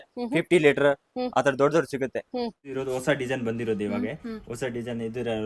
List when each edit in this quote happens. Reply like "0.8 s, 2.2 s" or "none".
2.6 s